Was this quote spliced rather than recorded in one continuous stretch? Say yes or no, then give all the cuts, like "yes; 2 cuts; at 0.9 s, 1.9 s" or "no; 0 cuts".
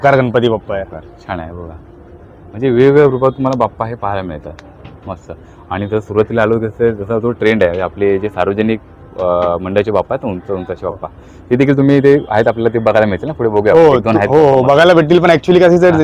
no; 0 cuts